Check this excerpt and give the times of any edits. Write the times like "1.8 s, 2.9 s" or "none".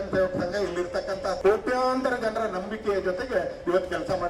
1.4 s